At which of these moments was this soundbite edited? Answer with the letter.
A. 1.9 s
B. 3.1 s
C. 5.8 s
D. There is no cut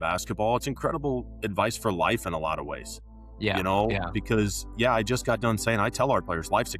D